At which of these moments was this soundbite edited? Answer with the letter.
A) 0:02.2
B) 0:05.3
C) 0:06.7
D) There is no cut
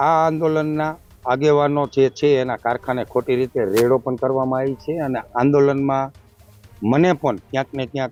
D